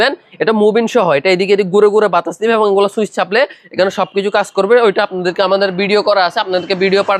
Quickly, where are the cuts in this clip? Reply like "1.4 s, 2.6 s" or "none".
none